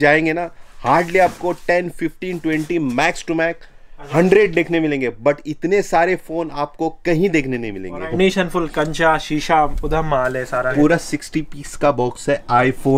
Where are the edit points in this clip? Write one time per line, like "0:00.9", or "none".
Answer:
0:08.1
0:10.7